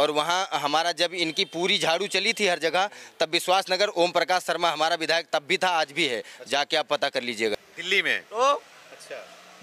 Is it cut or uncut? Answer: cut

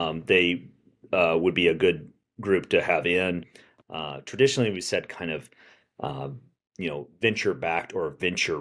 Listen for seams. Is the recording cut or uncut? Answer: cut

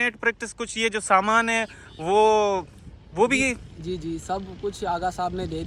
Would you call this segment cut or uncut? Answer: uncut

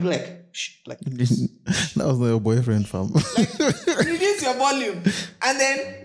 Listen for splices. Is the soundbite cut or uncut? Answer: uncut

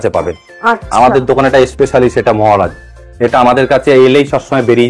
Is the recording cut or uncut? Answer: uncut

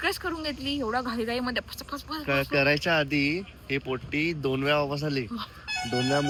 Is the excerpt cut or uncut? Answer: uncut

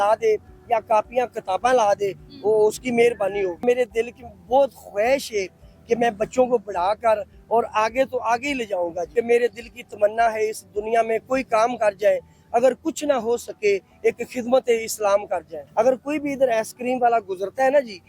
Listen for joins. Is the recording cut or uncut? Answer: cut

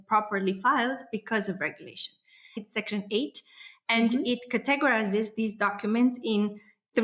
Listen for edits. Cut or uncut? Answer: cut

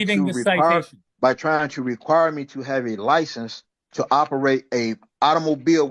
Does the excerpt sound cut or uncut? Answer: cut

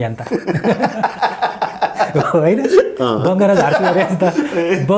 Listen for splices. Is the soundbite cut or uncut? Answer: uncut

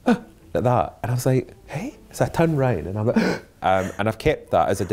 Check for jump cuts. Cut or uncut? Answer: cut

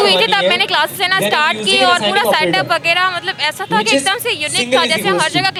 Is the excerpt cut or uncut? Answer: uncut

